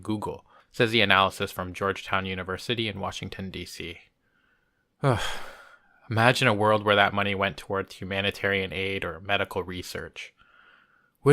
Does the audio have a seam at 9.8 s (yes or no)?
yes